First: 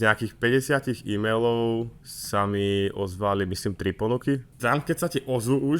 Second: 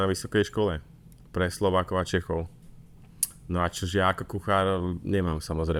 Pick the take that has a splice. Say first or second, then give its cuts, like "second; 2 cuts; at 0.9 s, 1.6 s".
first; 1 cut; at 4.5 s